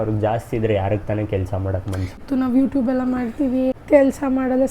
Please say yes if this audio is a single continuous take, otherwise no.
no